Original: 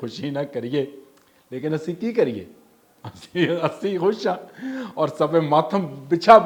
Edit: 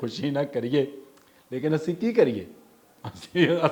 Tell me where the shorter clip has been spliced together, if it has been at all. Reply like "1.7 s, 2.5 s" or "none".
none